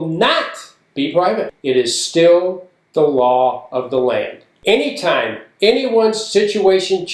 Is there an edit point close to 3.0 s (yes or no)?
no